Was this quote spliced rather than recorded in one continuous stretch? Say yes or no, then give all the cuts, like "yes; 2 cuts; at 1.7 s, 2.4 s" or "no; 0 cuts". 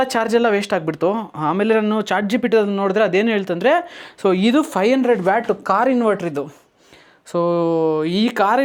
no; 0 cuts